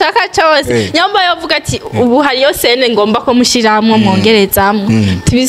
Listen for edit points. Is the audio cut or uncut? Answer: uncut